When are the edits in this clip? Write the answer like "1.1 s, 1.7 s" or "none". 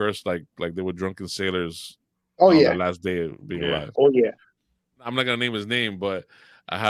5.1 s